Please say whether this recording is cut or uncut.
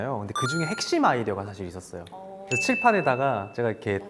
uncut